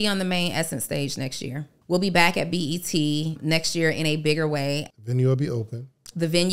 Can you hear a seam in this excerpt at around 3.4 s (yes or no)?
yes